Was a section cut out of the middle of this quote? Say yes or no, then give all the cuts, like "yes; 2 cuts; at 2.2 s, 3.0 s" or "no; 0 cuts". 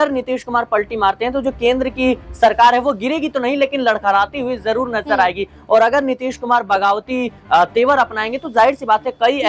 no; 0 cuts